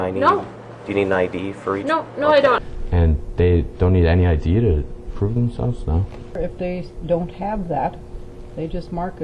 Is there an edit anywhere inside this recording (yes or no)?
no